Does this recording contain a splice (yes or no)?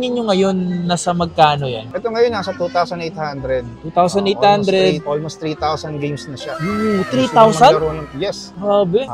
no